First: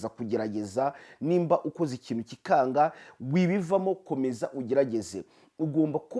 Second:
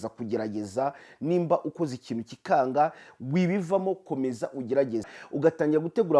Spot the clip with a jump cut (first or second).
second